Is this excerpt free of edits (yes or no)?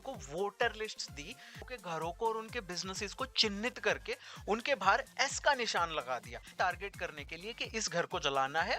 no